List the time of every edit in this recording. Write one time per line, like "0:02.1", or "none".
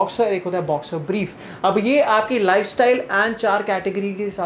none